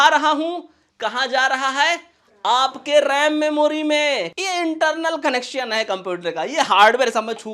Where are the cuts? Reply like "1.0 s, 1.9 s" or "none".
4.3 s

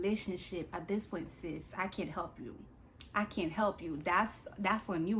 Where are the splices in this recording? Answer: none

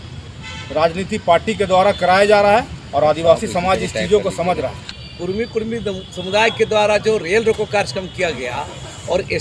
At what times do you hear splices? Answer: 4.9 s

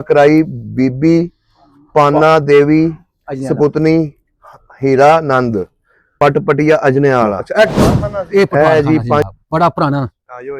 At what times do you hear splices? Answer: 9.2 s

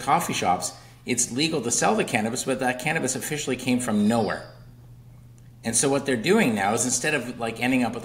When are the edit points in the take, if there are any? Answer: none

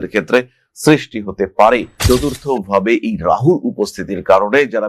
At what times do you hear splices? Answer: 2.0 s

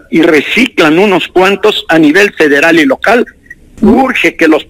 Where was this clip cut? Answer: 3.7 s

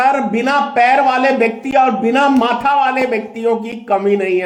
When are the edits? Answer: none

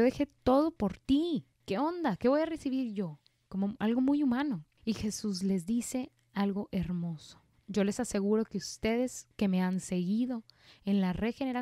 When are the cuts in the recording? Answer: 1.6 s, 4.7 s

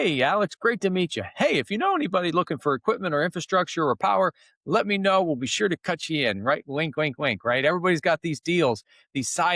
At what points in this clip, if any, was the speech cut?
none

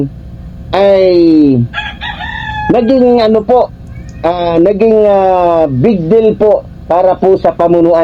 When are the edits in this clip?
none

